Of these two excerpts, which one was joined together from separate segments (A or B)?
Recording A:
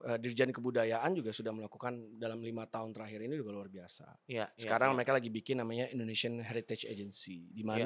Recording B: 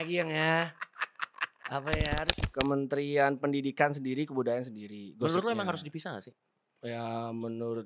B